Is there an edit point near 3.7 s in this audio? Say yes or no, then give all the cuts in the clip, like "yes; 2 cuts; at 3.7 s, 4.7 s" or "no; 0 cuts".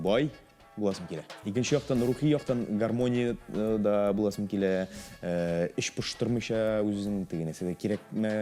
no; 1 cut; at 1.3 s